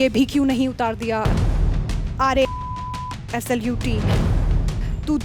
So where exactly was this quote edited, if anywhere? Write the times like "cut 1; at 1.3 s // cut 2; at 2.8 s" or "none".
none